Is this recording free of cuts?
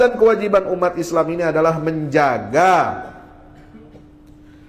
yes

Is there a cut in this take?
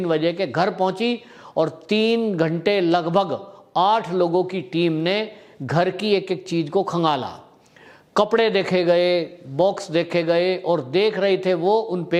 no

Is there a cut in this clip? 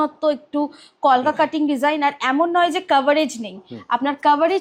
no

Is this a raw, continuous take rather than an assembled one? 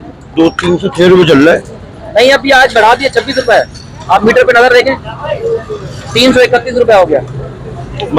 yes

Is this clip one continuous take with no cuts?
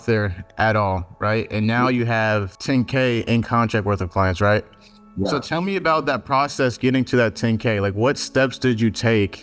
no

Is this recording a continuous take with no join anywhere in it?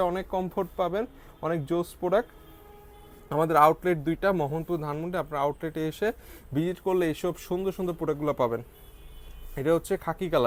yes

